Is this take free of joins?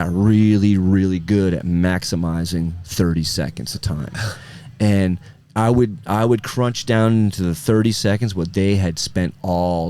yes; 0 cuts

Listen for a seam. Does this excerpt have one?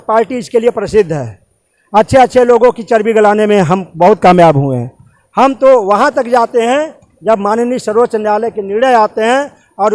no; 0 cuts

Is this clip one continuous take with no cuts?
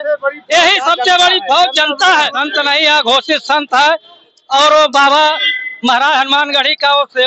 no; 1 cut; at 2.3 s

